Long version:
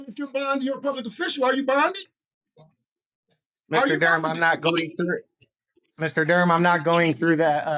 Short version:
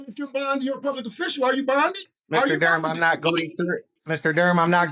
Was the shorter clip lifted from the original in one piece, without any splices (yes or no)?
no